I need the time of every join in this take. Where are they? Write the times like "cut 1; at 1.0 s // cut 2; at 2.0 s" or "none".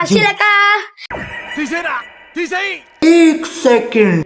cut 1; at 0.9 s // cut 2; at 2.9 s